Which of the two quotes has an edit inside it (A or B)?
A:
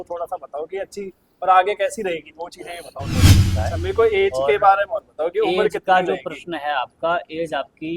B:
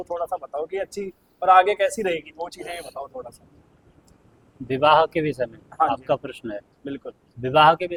A